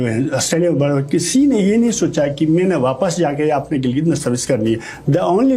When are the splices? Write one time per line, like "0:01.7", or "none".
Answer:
none